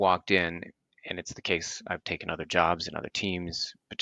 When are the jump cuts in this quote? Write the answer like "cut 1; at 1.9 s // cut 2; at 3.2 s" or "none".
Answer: none

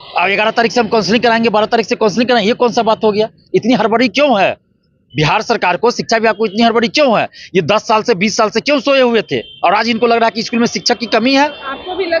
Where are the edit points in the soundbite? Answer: none

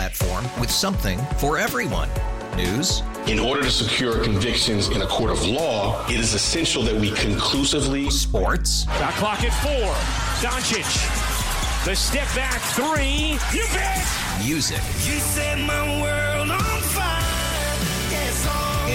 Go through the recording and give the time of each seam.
none

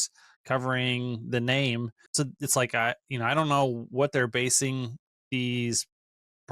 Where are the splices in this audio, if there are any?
cut 1; at 2.0 s

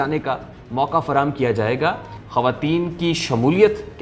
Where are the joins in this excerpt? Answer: cut 1; at 2.1 s

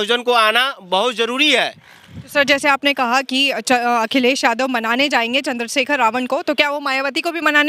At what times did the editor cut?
none

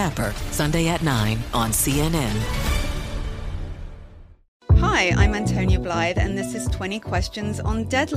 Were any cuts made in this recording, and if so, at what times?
cut 1; at 4.5 s

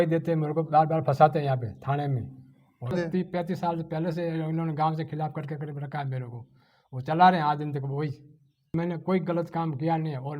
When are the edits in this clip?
cut 1; at 2.9 s // cut 2; at 8.7 s

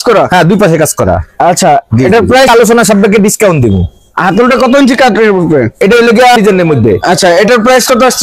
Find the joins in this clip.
cut 1; at 2.5 s // cut 2; at 6.4 s

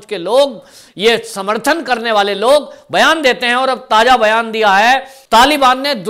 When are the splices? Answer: cut 1; at 5.2 s

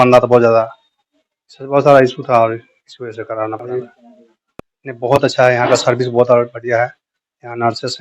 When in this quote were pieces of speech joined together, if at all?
cut 1; at 3.6 s

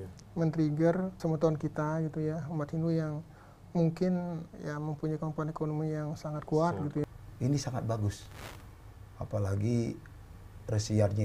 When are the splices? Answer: cut 1; at 1.2 s // cut 2; at 4.5 s // cut 3; at 7.0 s

